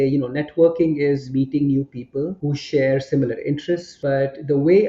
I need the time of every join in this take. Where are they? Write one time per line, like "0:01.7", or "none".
0:01.3
0:02.4
0:03.9